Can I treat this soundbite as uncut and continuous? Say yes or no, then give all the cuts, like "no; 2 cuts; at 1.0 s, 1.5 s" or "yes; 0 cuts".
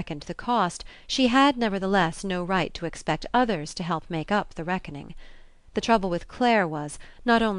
no; 1 cut; at 3.2 s